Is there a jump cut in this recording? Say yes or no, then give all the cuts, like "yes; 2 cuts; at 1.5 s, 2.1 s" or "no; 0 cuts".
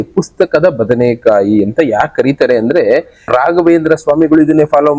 yes; 1 cut; at 3.3 s